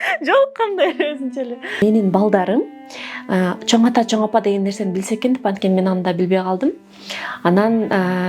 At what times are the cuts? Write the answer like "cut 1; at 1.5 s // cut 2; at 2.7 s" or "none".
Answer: cut 1; at 1.8 s